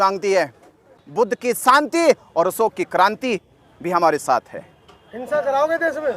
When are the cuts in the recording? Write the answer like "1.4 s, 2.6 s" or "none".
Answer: 1.0 s